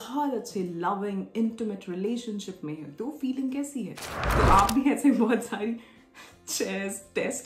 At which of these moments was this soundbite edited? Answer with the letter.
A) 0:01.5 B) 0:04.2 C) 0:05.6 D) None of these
B